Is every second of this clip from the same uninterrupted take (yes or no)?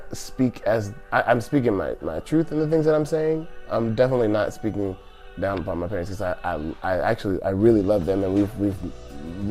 yes